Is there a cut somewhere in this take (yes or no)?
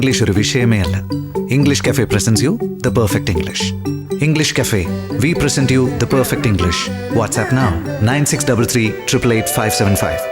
no